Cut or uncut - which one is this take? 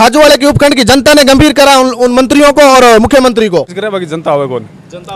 cut